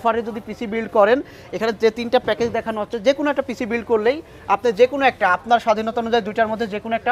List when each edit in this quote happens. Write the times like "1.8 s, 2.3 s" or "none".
none

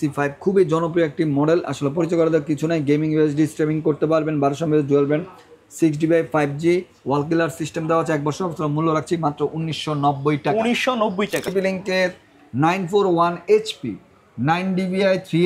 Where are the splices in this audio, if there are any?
11.5 s

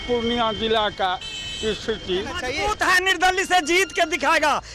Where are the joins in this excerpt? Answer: 2.5 s

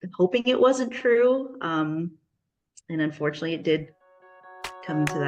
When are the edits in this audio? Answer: none

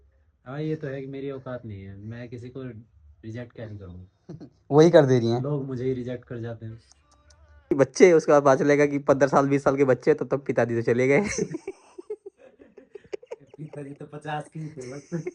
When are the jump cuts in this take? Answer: 7.7 s

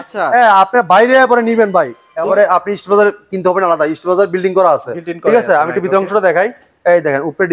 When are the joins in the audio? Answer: 2.1 s

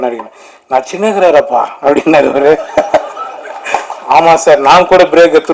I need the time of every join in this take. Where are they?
none

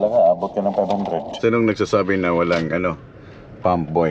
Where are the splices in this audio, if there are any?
1.3 s

